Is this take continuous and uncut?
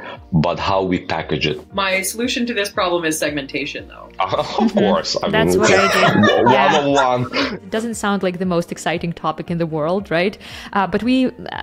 no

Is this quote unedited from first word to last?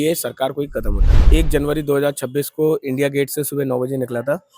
no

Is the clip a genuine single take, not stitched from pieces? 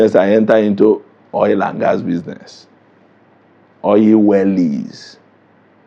yes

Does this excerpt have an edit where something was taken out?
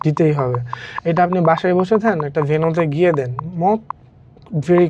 no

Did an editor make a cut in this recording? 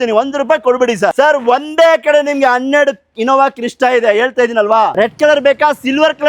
yes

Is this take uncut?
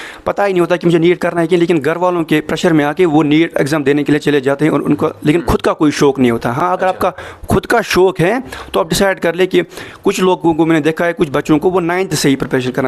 yes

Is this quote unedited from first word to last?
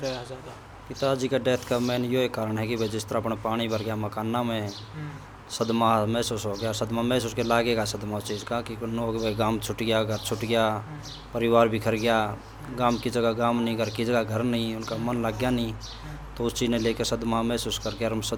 yes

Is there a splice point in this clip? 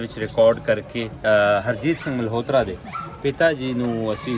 yes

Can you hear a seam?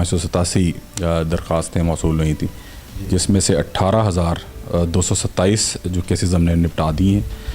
no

